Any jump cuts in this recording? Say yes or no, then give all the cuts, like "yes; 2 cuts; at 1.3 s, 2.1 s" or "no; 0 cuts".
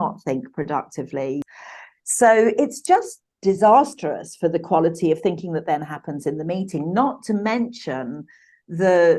yes; 1 cut; at 1.5 s